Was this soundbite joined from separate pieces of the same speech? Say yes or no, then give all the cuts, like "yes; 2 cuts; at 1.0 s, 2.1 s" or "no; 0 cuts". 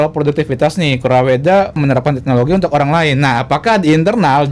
yes; 1 cut; at 1.8 s